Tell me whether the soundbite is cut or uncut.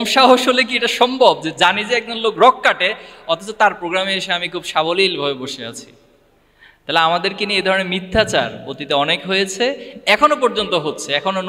uncut